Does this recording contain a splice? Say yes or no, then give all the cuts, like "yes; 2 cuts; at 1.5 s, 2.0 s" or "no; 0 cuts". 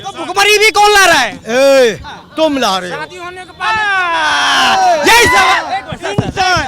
no; 0 cuts